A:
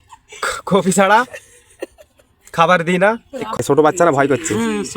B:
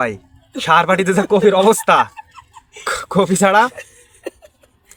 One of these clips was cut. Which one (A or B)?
A